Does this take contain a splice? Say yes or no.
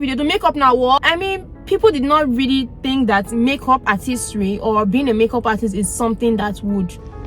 yes